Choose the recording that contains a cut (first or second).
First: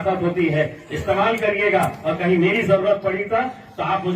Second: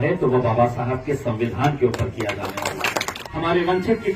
second